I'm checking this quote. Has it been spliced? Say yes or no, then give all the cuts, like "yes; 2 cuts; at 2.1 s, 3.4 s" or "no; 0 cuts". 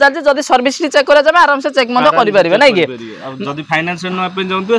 no; 0 cuts